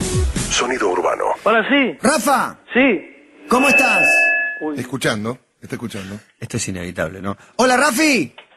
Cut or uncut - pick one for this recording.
uncut